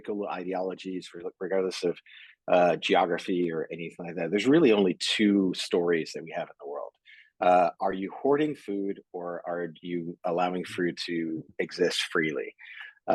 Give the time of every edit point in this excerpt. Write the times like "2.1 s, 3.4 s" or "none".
none